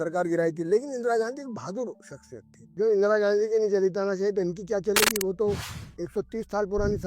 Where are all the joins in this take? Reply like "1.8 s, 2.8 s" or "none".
2.7 s

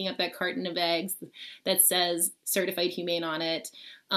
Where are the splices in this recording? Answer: none

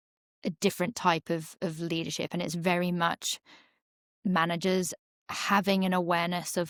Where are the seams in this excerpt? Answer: none

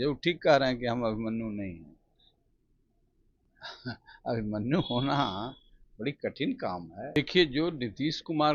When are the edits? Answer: 7.2 s

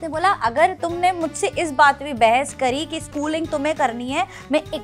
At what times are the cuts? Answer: none

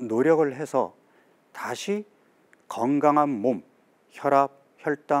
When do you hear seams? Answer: none

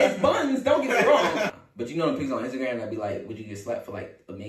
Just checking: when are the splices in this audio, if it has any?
1.5 s

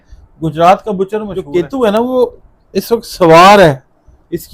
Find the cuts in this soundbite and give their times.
1.4 s

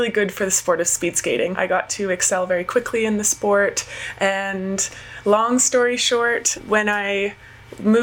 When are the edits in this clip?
1.5 s, 6.5 s

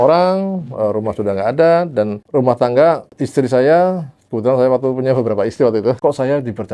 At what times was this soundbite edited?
2.2 s, 3.1 s, 6.0 s

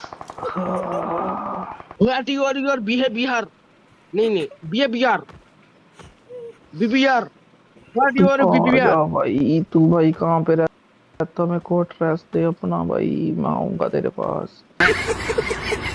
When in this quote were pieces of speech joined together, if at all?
1.8 s

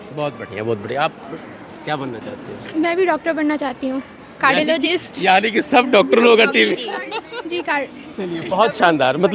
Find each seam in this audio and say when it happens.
none

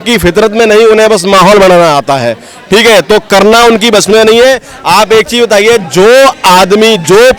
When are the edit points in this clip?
none

